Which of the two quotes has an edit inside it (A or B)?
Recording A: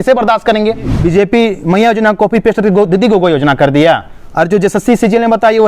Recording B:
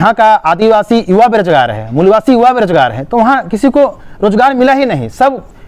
A